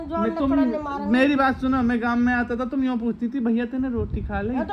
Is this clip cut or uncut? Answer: uncut